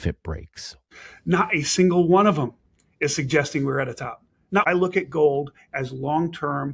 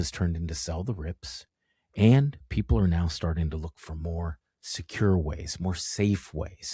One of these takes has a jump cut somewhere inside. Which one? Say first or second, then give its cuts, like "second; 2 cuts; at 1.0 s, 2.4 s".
first; 2 cuts; at 0.9 s, 4.7 s